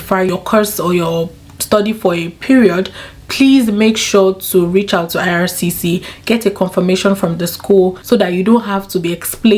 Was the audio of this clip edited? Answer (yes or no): no